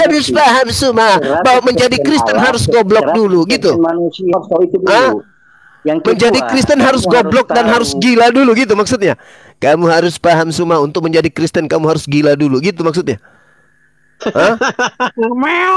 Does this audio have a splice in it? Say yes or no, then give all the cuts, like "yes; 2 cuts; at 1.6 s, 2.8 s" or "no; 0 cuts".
no; 0 cuts